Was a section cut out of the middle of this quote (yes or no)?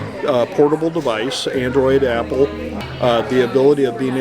yes